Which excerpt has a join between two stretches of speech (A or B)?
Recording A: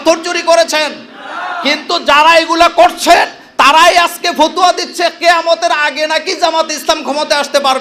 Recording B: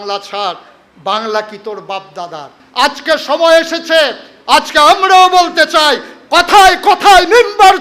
B